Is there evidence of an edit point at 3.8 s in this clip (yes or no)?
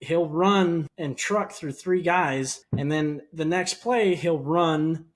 no